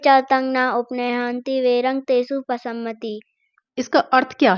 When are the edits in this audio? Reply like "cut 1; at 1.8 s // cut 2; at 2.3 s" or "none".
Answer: none

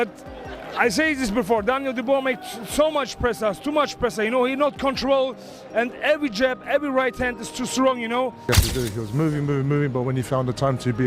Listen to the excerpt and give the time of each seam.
cut 1; at 8.4 s

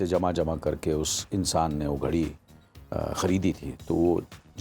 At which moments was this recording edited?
none

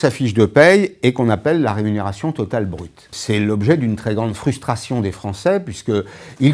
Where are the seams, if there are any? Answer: cut 1; at 3.1 s

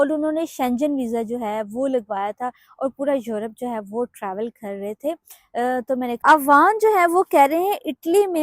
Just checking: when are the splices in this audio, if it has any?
cut 1; at 6.2 s

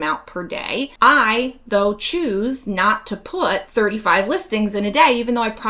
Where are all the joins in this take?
cut 1; at 0.9 s // cut 2; at 3.7 s

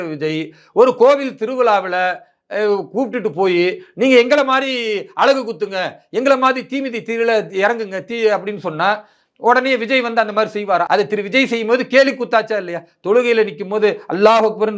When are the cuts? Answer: cut 1; at 10.9 s

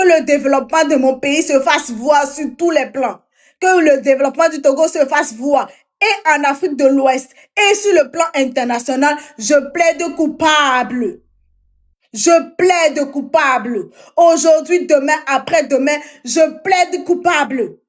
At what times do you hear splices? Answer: none

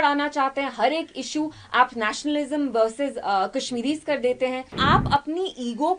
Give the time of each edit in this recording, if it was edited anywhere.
cut 1; at 4.8 s

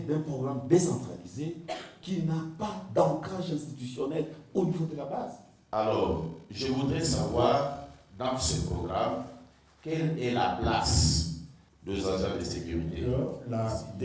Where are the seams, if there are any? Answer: cut 1; at 5.5 s // cut 2; at 13.0 s

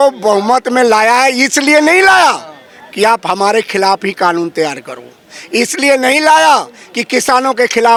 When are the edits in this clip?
none

